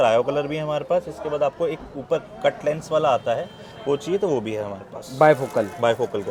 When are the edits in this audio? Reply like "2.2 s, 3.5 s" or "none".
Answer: none